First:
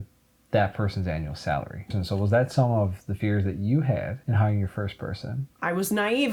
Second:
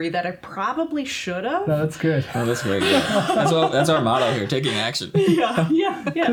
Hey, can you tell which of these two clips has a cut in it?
first; 3 cuts; at 1.9 s, 4.2 s, 5.5 s

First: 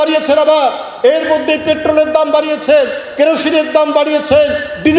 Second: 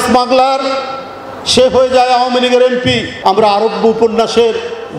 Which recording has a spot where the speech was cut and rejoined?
second; 1 cut; at 3.1 s

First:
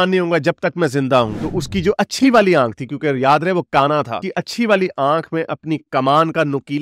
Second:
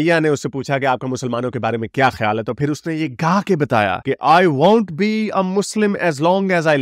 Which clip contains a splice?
first; 1 cut; at 1.4 s

